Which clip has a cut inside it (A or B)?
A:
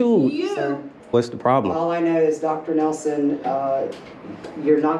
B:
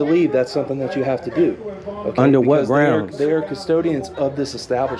A